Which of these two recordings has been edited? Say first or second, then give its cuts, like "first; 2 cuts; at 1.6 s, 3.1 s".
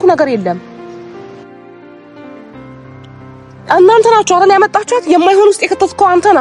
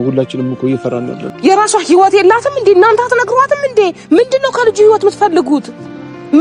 second; 1 cut; at 1.2 s